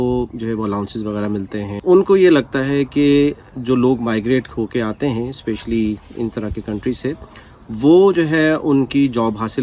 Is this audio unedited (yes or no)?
no